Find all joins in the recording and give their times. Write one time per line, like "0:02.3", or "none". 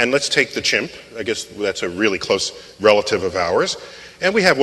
0:02.4